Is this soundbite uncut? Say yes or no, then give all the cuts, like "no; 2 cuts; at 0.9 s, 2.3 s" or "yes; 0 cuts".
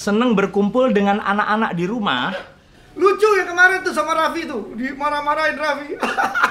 yes; 0 cuts